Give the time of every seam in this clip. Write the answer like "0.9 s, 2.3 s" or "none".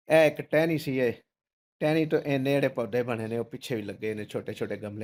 none